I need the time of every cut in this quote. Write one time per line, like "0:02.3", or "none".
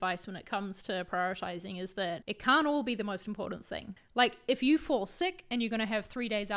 0:02.3
0:03.9